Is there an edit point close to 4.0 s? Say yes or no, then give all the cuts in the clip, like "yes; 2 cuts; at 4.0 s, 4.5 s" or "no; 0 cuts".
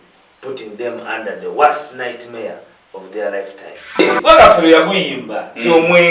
yes; 1 cut; at 4.0 s